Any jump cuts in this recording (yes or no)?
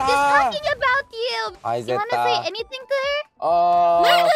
yes